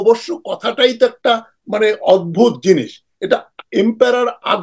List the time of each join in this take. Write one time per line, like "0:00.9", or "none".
none